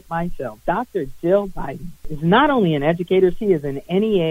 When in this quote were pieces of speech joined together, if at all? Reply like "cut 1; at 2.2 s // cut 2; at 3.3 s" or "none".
cut 1; at 2.1 s